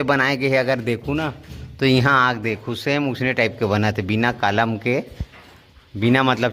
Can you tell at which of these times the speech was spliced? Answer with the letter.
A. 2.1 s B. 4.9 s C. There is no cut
C